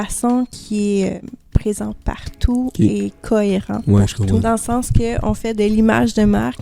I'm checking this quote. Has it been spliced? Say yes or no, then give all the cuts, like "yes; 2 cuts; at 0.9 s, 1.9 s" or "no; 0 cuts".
yes; 2 cuts; at 1.2 s, 4.4 s